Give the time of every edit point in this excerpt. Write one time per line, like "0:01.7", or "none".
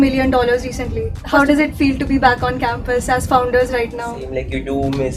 0:01.2
0:04.2